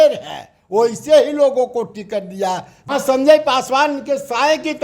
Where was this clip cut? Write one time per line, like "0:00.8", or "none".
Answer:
0:02.9

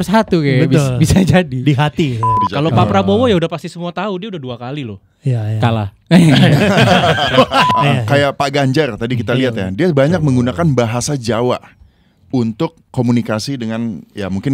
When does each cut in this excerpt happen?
0:02.3
0:07.7

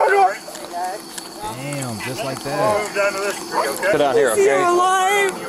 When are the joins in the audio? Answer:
0:03.9

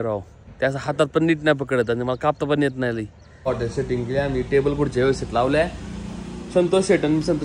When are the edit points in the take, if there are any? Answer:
0:03.3

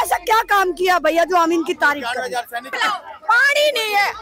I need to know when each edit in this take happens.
0:02.7

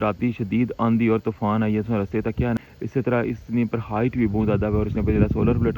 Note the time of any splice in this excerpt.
0:02.6

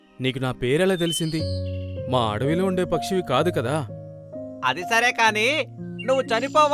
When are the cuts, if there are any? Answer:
none

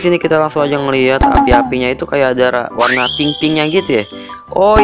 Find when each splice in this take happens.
none

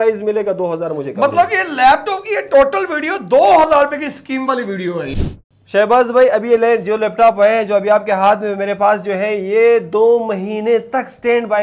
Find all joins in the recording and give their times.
0:05.6

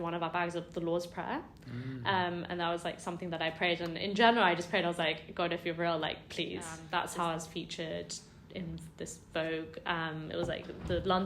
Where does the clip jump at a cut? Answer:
0:06.8

